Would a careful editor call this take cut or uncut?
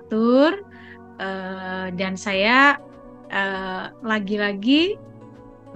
uncut